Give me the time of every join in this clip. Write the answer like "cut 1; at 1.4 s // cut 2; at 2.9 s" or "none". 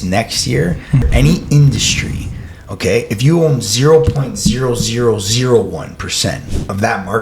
cut 1; at 1.0 s